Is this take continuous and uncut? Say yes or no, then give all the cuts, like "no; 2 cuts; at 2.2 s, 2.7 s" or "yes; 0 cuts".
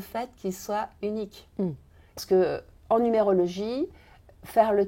no; 1 cut; at 2.2 s